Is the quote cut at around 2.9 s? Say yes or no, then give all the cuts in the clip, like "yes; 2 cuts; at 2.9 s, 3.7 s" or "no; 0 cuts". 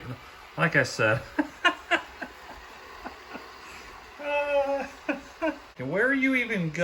no; 1 cut; at 5.8 s